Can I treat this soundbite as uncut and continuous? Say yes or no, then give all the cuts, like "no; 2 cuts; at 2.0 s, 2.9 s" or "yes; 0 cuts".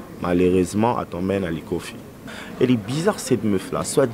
no; 1 cut; at 2.3 s